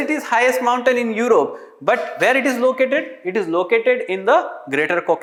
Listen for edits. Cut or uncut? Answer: uncut